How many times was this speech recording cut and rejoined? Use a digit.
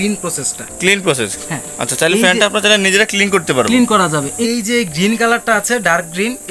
1